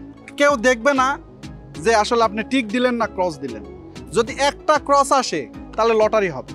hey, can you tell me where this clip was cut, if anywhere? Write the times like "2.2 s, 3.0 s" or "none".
none